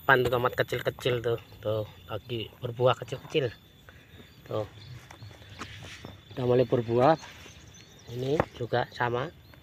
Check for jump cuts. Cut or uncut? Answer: uncut